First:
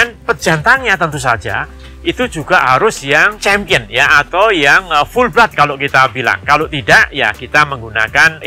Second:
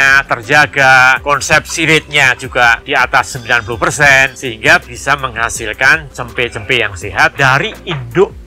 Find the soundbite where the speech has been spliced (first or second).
second